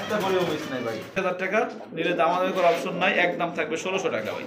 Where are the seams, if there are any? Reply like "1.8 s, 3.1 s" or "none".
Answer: 1.2 s

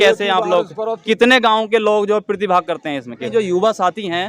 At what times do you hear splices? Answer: 1.0 s, 3.3 s

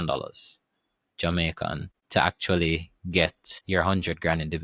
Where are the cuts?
1.9 s, 3.5 s

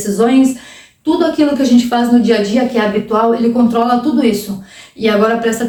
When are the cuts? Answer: none

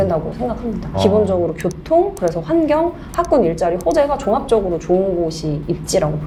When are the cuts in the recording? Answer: none

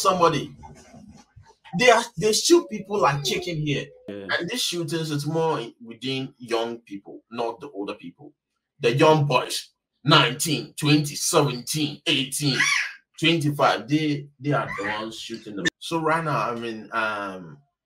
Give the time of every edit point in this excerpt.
4.1 s, 15.8 s

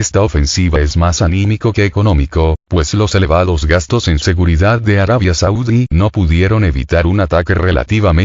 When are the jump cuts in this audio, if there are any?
2.6 s

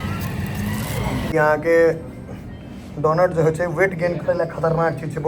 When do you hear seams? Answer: 1.2 s

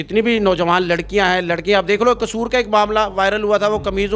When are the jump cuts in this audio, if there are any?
none

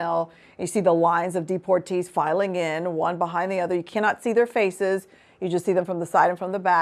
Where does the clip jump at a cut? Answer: none

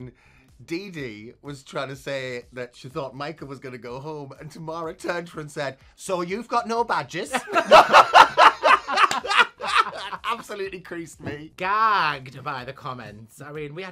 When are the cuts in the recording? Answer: 11.5 s

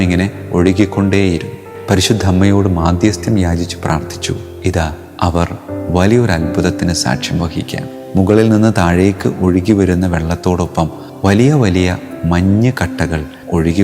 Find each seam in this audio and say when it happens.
1.6 s

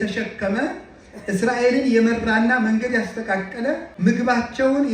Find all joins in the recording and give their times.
3.9 s

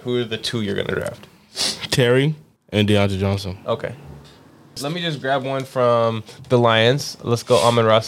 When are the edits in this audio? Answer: 2.5 s, 4.8 s

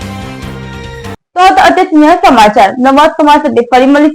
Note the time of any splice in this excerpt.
none

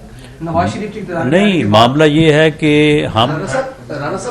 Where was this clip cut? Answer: 3.4 s

